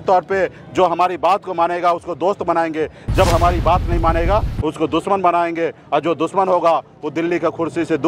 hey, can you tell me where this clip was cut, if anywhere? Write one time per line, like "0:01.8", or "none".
none

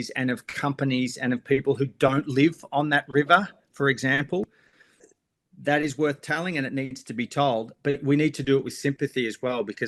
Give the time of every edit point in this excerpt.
none

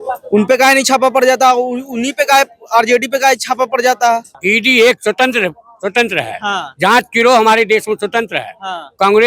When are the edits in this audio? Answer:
0:04.4

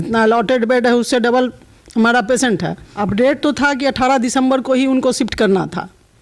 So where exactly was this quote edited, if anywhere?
0:02.8

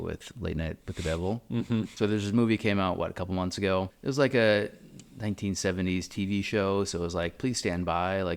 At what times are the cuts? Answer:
0:01.9
0:03.9

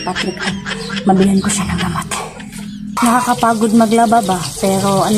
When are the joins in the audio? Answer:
0:03.0

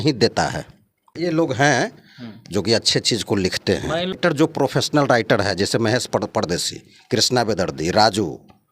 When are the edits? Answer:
0:01.0
0:04.2

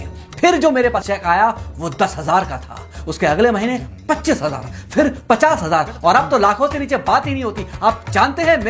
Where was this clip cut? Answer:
0:01.0

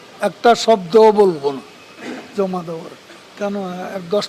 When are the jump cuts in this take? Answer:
0:03.3

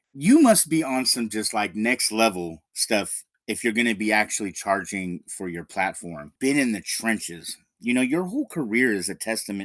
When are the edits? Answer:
0:06.3

